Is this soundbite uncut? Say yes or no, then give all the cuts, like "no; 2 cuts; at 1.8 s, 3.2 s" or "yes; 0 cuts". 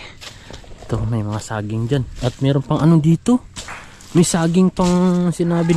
yes; 0 cuts